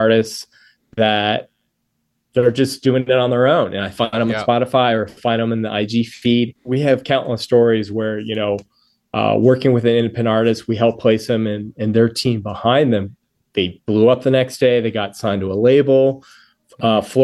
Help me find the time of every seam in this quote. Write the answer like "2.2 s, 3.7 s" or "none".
6.6 s